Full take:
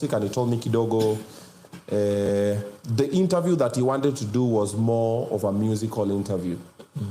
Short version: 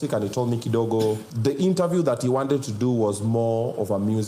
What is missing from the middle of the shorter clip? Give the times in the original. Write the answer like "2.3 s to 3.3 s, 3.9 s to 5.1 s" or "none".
1.3 s to 2.8 s